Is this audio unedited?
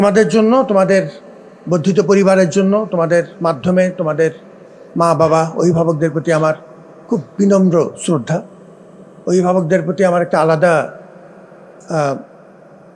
yes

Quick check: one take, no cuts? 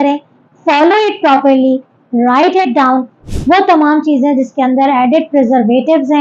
no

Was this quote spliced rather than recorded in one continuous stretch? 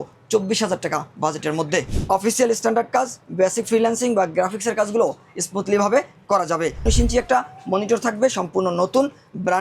yes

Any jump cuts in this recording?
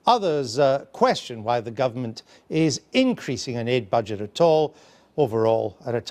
yes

